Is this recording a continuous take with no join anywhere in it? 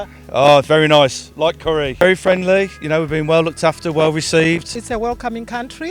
no; 2 cuts; at 1.9 s, 4.7 s

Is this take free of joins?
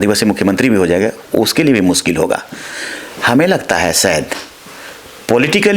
yes; 0 cuts

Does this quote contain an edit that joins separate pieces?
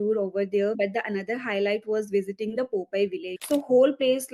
yes; 2 cuts; at 0.8 s, 3.3 s

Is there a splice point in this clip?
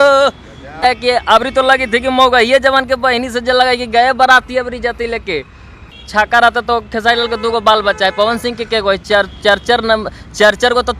yes; 2 cuts; at 0.8 s, 5.9 s

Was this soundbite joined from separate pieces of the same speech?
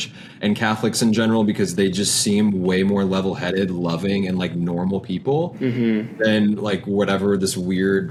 no; 0 cuts

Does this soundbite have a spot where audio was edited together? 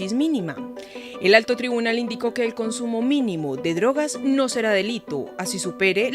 yes; 1 cut; at 1.9 s

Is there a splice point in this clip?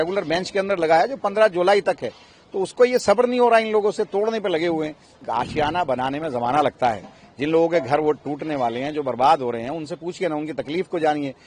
yes; 1 cut; at 5.2 s

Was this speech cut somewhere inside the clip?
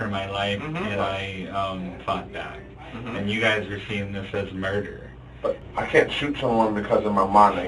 yes; 1 cut; at 5.6 s

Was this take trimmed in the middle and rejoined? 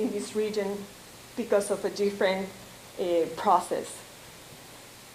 yes; 1 cut; at 1.5 s

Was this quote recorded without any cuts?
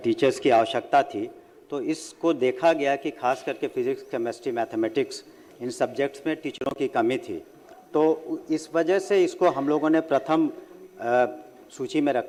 yes; 0 cuts

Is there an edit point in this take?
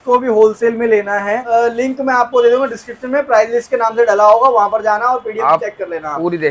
yes; 1 cut; at 1.4 s

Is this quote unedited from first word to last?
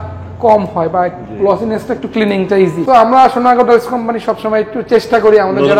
no; 1 cut; at 2.8 s

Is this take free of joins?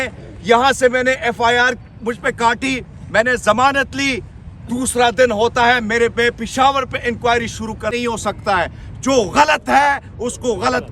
no; 1 cut; at 7.9 s

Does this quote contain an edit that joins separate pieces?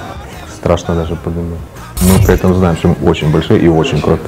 yes; 1 cut; at 2.0 s

